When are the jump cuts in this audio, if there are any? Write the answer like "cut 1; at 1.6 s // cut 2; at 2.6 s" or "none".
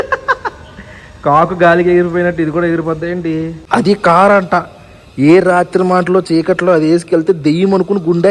cut 1; at 3.6 s